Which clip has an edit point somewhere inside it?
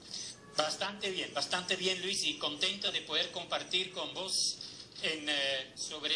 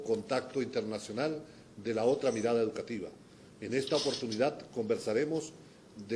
first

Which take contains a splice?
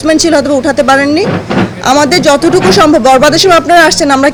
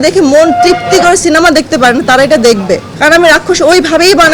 second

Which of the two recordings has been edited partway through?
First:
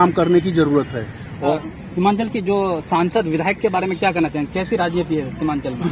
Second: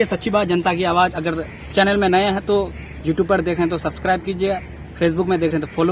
first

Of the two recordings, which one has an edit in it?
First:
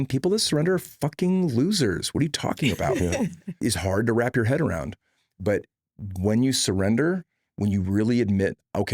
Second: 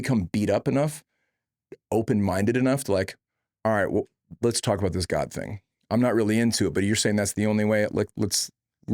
first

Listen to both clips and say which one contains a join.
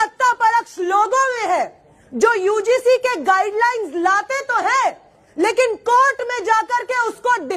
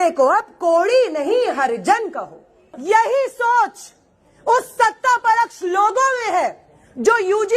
second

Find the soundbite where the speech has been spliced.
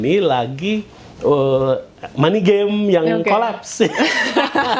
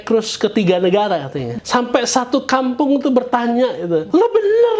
second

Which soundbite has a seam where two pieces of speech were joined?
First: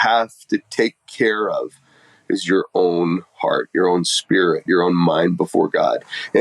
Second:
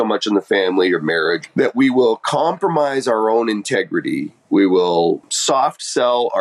second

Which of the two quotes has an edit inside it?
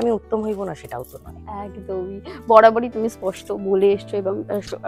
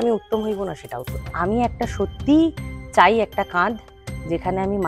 second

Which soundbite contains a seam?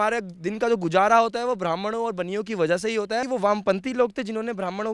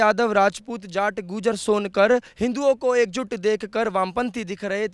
first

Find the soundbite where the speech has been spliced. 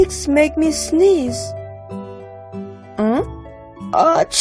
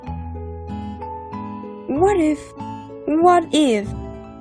first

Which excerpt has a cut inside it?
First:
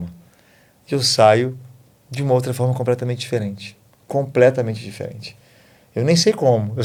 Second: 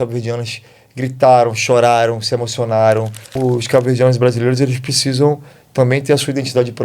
second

